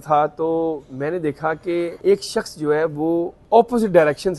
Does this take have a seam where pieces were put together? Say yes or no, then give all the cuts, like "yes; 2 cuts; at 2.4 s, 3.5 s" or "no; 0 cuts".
yes; 2 cuts; at 1.9 s, 3.4 s